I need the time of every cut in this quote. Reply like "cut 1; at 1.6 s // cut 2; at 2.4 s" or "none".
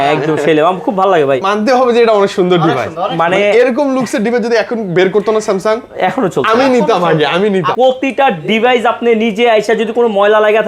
cut 1; at 1.4 s // cut 2; at 7.7 s

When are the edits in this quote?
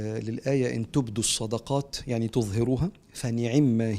none

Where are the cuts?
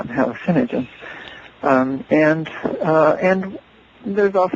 none

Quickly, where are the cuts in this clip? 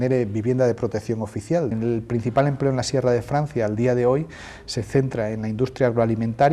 cut 1; at 1.7 s

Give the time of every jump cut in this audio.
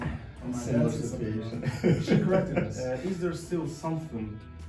cut 1; at 2.7 s

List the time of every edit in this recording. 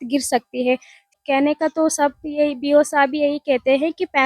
cut 1; at 1.1 s

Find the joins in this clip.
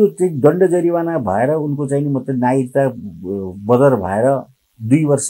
none

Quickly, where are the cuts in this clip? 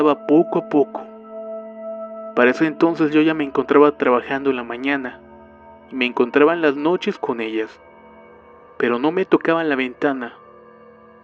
cut 1; at 7.4 s

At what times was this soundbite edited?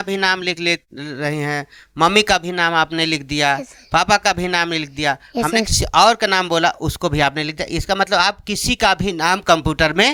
none

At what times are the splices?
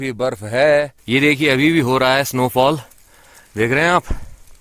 cut 1; at 1.0 s

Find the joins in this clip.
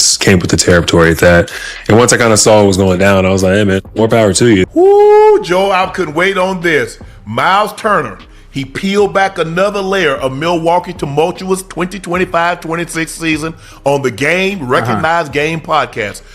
cut 1; at 4.7 s

